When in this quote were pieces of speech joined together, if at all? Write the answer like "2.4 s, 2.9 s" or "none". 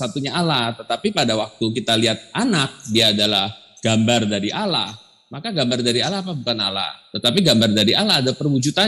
none